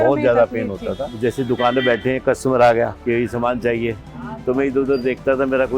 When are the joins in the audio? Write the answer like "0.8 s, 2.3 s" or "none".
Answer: 1.1 s, 3.0 s